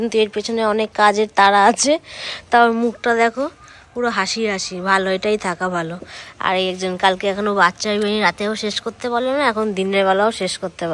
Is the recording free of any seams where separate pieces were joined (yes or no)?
yes